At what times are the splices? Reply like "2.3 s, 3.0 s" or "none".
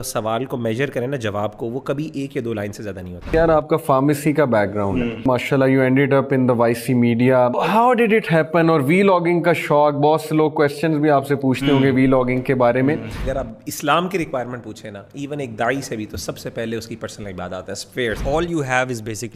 3.3 s, 5.2 s, 7.6 s, 13.2 s, 18.2 s